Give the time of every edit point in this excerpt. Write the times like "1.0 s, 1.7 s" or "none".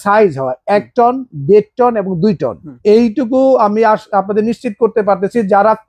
2.7 s

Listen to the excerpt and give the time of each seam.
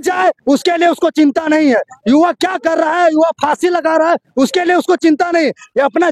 none

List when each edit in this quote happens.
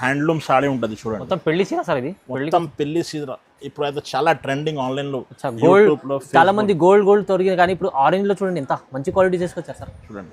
none

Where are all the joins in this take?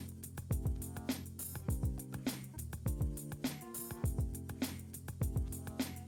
none

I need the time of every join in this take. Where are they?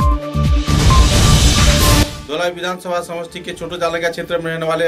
none

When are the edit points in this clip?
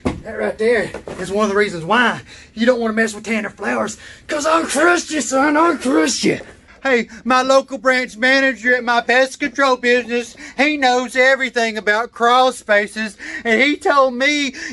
6.7 s

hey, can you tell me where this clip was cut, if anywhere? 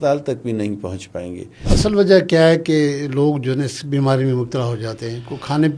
1.5 s

